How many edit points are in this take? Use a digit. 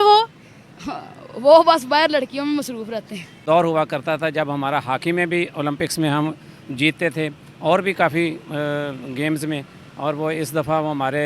1